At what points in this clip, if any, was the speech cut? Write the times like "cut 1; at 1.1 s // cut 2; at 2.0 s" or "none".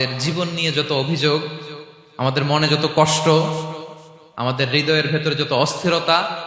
none